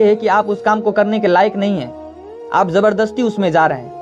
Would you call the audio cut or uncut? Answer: uncut